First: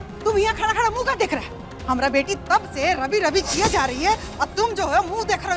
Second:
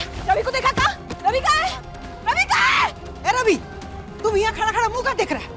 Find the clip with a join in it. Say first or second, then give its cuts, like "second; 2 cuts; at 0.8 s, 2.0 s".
second; 1 cut; at 3.1 s